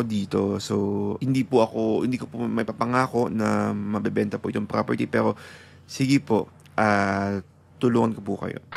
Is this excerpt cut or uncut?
uncut